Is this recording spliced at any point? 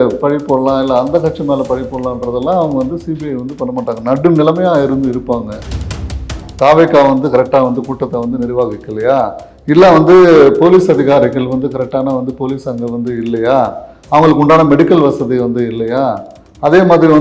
yes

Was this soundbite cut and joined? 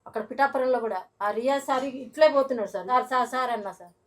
yes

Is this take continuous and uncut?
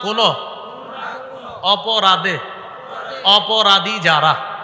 yes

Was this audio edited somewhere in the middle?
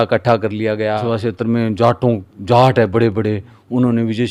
yes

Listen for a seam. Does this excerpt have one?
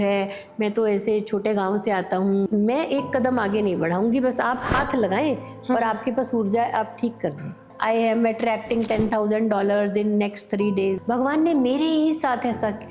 yes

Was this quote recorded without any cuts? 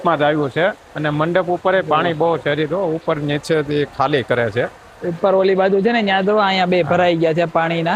yes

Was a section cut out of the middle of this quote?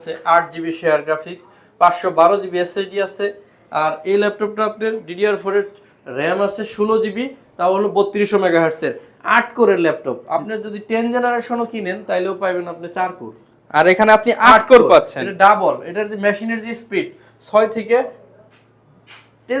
no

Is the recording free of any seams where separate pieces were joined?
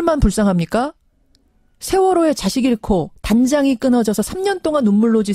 yes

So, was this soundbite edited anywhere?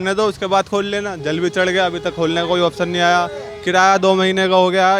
no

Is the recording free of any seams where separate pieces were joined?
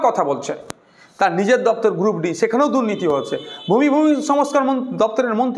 yes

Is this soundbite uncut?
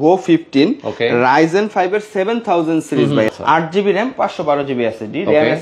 no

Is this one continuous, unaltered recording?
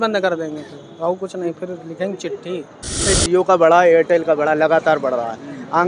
no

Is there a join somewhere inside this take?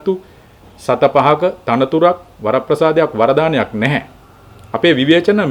no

